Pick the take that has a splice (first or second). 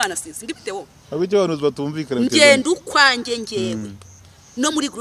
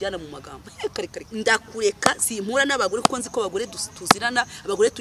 second